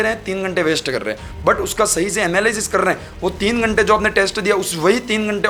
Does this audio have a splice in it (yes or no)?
no